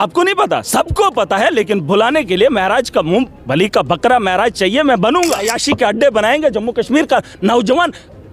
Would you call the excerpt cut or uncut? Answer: cut